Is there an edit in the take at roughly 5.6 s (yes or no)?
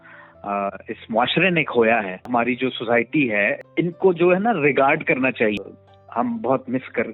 yes